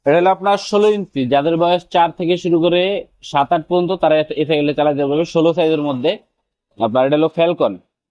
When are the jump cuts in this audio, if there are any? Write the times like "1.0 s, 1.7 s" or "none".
none